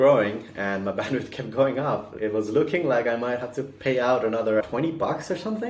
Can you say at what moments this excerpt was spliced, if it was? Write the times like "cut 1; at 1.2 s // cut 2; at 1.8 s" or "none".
cut 1; at 2.1 s // cut 2; at 4.6 s